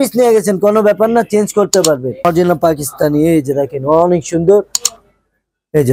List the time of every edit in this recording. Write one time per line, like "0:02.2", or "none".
0:02.2